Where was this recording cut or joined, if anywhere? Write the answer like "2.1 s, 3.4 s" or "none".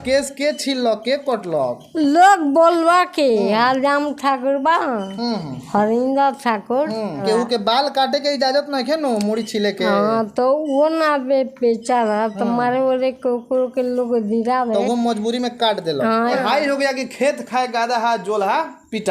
7.2 s, 16.3 s